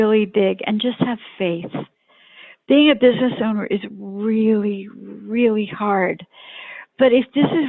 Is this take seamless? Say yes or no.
yes